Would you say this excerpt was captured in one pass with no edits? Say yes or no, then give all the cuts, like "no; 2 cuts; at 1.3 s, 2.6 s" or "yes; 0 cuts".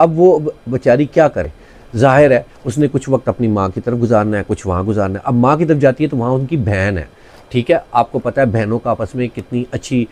yes; 0 cuts